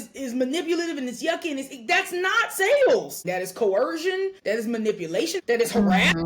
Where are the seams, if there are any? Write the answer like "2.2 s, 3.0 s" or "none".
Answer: 3.2 s, 4.4 s, 5.4 s